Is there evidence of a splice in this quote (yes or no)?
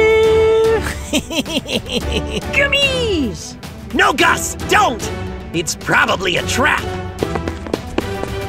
no